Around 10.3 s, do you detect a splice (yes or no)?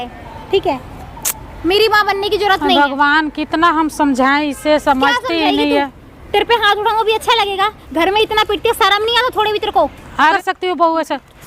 yes